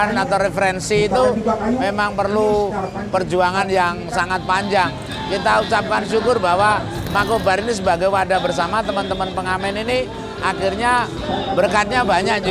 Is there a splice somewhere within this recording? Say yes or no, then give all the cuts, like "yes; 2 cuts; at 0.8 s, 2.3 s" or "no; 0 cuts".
yes; 1 cut; at 5.1 s